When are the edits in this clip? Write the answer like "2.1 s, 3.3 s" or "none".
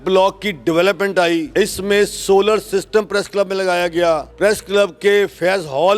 1.5 s, 4.3 s